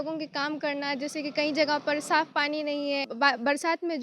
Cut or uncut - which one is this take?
cut